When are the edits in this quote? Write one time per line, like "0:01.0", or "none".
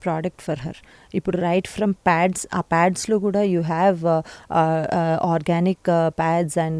none